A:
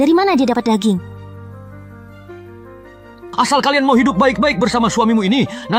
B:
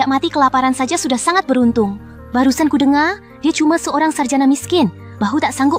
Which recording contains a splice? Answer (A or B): A